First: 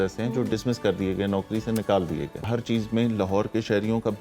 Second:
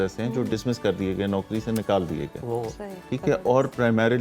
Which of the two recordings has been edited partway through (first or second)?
first